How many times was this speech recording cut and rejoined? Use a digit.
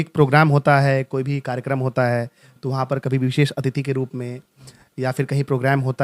0